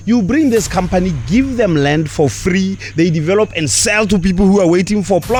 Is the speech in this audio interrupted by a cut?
no; 0 cuts

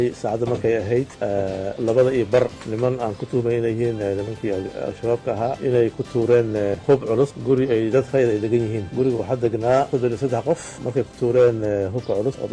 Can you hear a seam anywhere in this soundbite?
yes; 3 cuts; at 2.6 s, 6.8 s, 10.8 s

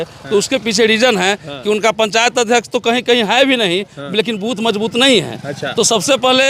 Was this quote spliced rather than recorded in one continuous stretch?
no; 0 cuts

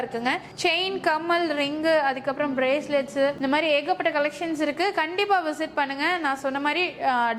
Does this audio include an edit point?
no; 0 cuts

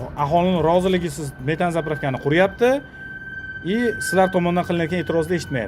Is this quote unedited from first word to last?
yes; 0 cuts

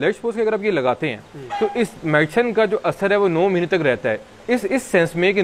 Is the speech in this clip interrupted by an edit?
no; 0 cuts

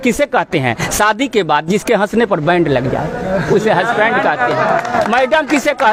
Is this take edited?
no; 0 cuts

